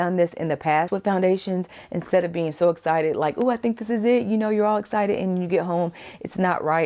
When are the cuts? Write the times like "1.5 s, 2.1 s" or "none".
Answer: none